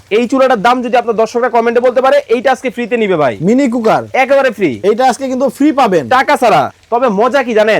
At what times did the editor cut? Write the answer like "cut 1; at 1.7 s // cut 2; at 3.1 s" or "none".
cut 1; at 6.7 s

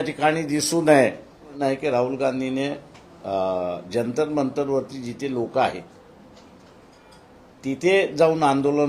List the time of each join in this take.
cut 1; at 1.4 s

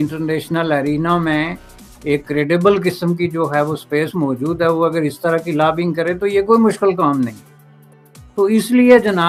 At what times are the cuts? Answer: none

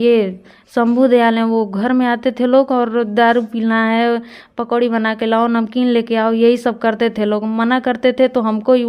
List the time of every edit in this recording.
none

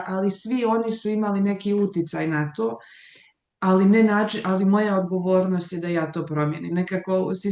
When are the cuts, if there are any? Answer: none

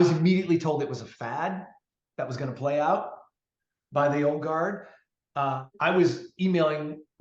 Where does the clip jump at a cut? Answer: cut 1; at 5.7 s

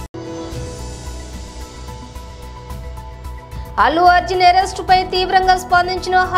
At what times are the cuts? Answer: cut 1; at 3.5 s

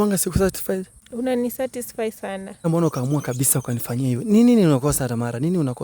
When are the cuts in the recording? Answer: cut 1; at 1.0 s // cut 2; at 2.6 s

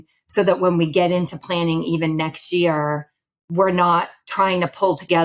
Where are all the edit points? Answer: none

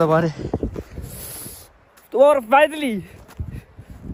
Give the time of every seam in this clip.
none

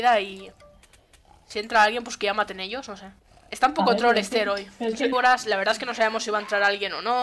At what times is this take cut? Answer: none

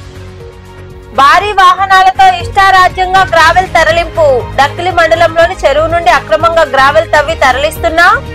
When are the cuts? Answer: cut 1; at 1.1 s

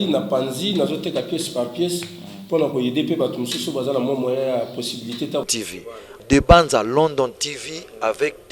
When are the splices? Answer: cut 1; at 5.4 s

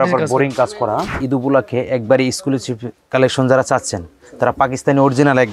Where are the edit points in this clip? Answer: cut 1; at 1.1 s

